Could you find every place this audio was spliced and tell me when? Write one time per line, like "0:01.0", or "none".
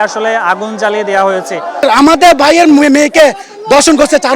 0:01.8